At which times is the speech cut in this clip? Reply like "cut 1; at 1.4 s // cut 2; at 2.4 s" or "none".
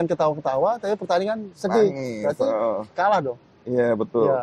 none